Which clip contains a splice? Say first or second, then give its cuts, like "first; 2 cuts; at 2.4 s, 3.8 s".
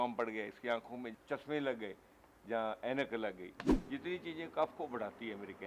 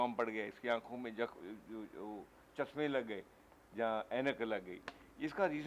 first; 2 cuts; at 1.1 s, 3.7 s